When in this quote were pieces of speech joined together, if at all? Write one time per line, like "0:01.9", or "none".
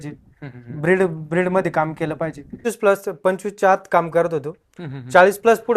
0:02.6